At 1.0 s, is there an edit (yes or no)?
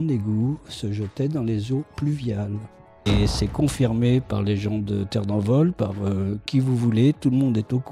no